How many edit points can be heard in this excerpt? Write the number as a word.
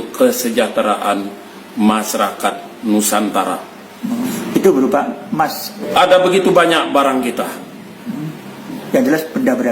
two